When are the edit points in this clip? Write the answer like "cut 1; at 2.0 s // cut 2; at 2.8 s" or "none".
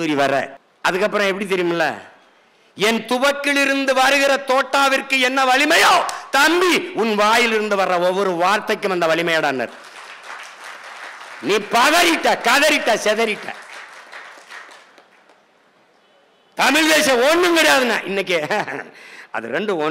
none

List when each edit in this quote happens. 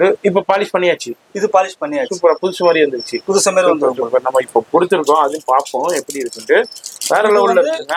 none

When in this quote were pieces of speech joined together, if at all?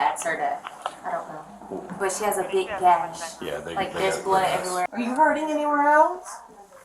cut 1; at 4.8 s

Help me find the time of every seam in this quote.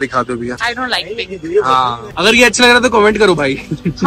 cut 1; at 2.1 s

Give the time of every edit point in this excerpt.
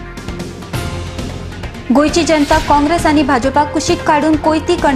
cut 1; at 1.3 s

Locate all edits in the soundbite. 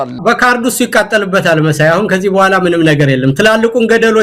none

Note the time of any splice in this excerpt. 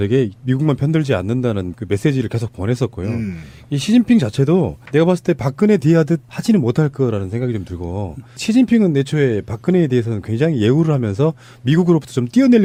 none

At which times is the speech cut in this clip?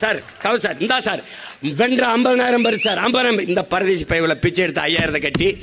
none

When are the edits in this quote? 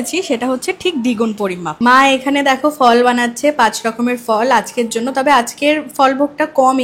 none

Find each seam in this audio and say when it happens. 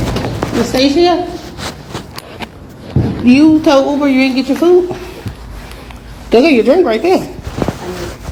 none

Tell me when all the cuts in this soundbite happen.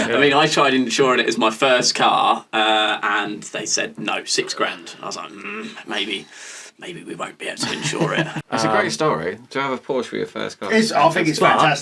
cut 1; at 8.4 s

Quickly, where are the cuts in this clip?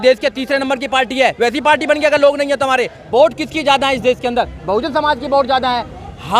cut 1; at 3.0 s

